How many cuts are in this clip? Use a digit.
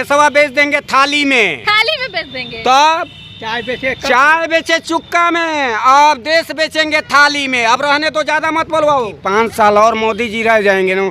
2